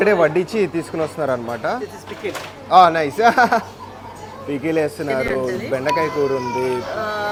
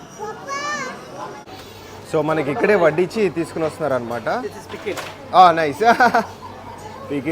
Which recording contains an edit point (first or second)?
second